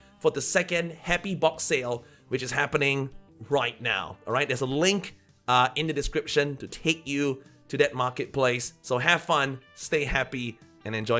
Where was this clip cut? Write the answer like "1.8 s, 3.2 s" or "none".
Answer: none